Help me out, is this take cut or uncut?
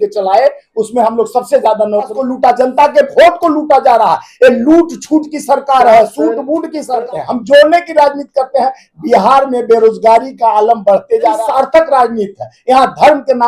cut